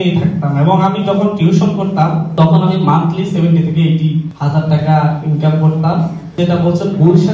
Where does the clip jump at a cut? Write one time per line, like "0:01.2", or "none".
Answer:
0:06.4